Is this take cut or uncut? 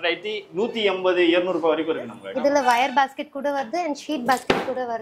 cut